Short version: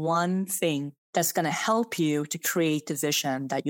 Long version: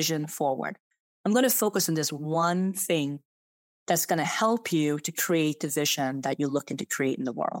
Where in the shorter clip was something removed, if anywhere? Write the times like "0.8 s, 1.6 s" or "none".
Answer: 1.0 s